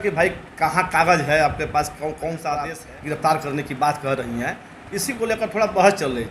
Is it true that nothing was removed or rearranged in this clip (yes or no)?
no